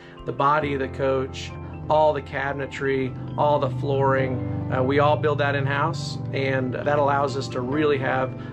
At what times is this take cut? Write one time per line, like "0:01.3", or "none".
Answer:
0:01.7
0:06.8